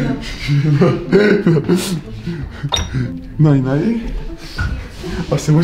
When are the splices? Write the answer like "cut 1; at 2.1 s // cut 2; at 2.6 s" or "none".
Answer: none